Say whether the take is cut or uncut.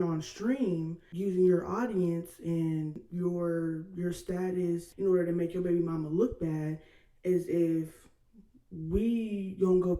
cut